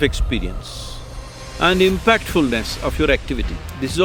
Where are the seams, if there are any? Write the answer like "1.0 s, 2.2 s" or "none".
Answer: none